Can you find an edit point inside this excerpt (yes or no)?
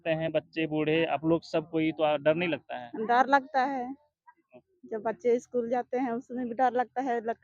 no